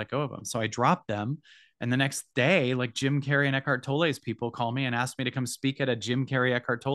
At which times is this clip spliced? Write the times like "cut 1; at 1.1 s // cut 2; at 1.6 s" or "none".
none

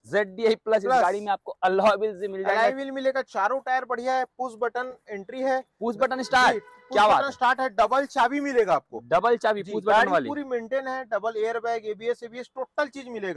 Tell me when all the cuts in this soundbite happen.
none

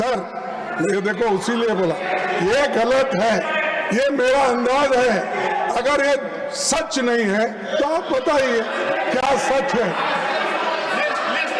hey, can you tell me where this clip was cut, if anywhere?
none

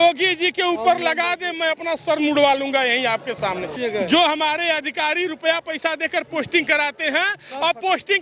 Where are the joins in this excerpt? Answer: cut 1; at 3.7 s

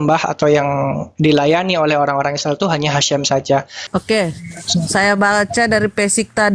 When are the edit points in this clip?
cut 1; at 3.9 s

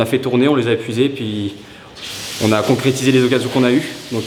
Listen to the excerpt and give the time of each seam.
none

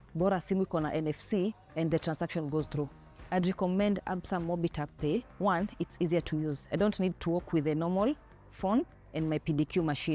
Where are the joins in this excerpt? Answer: none

